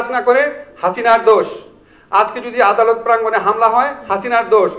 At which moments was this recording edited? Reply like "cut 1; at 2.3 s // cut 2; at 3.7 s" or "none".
none